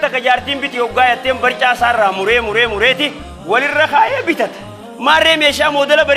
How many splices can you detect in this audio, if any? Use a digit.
0